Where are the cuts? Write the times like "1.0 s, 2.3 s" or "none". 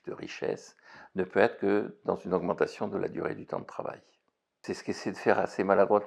4.6 s